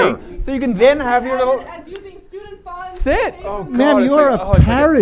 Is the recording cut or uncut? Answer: uncut